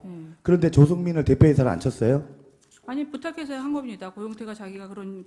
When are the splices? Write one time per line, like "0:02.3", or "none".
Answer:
0:01.8